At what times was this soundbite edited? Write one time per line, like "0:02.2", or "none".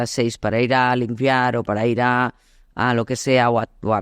none

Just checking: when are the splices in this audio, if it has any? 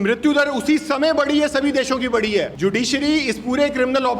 0:02.5

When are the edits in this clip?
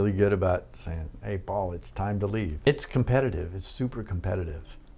0:02.7

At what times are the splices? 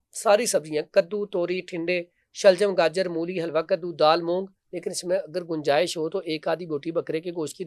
none

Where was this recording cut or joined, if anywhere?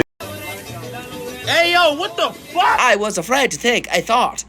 0:02.8

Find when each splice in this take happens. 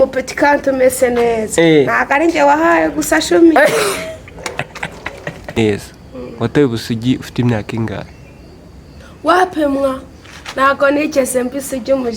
0:05.6

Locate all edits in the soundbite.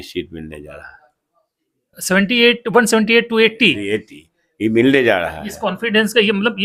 none

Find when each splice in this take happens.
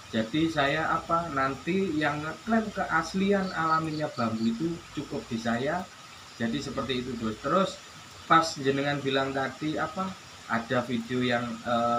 none

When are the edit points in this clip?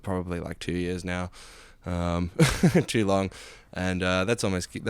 none

